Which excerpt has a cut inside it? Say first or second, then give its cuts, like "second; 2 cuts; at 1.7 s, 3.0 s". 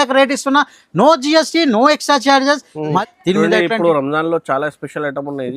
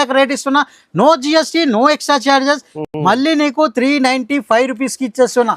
first; 1 cut; at 2.9 s